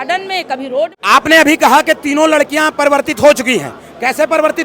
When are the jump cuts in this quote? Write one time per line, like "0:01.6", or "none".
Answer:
0:01.0